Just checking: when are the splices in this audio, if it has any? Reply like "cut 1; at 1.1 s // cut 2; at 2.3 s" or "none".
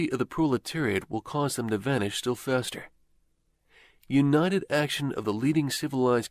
cut 1; at 1.9 s